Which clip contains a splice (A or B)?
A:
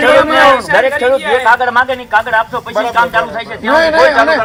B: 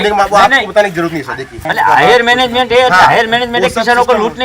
B